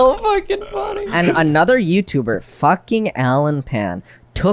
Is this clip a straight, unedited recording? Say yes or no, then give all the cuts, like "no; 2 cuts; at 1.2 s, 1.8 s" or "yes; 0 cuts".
no; 1 cut; at 1.1 s